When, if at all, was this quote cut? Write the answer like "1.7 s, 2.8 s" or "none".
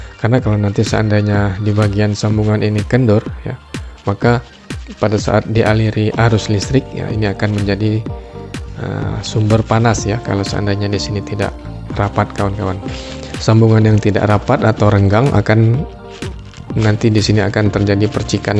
12.9 s

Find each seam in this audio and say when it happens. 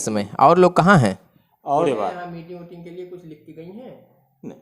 1.9 s

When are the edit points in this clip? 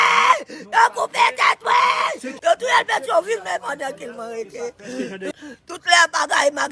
2.3 s, 5.4 s

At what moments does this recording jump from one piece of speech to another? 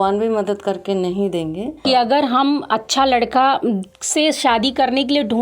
1.8 s

